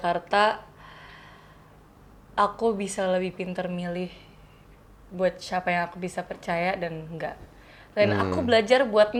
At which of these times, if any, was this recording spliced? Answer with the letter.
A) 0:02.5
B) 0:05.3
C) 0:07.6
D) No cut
D